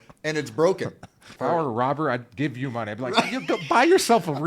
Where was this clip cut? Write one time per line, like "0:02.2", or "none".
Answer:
0:01.3